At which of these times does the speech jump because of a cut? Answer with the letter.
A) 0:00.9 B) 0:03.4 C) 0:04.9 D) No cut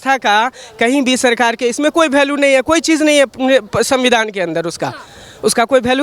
D